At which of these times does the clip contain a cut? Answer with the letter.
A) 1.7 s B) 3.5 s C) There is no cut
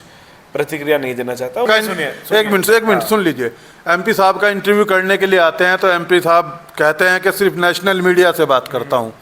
A